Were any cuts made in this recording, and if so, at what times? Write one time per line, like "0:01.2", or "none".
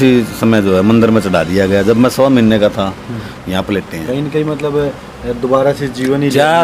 0:03.3